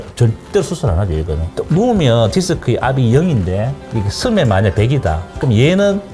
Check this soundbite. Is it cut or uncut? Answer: cut